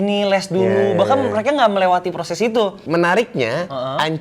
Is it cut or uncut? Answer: cut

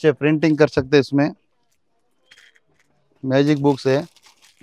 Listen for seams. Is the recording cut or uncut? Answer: uncut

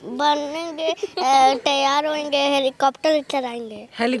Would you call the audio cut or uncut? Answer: uncut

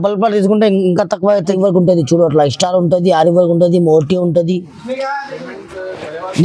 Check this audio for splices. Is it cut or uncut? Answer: cut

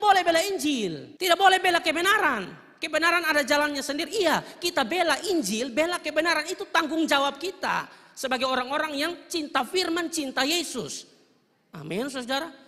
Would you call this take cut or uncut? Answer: uncut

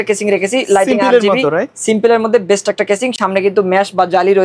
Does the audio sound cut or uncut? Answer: uncut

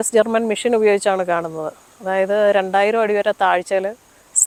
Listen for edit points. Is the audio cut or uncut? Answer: uncut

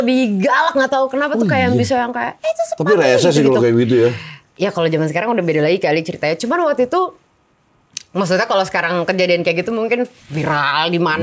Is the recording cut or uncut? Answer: uncut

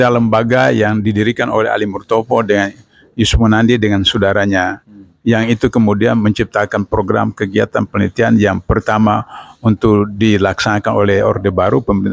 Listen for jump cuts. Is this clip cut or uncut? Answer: uncut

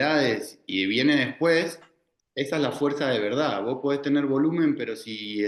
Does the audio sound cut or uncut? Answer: uncut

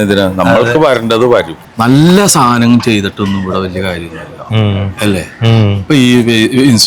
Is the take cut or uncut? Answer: cut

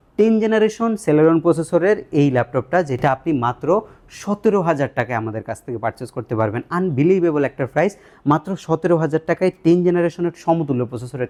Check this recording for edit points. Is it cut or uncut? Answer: uncut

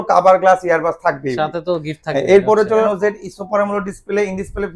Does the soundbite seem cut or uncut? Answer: cut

